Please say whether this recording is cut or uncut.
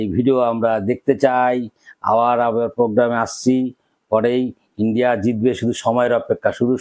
uncut